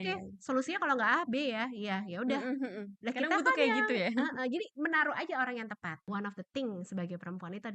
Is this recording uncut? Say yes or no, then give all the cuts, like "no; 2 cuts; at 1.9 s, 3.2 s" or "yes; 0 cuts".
no; 1 cut; at 6.0 s